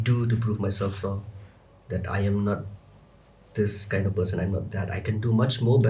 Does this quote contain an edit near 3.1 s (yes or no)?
no